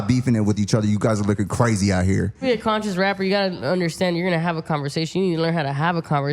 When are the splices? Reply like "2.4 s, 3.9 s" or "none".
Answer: 2.4 s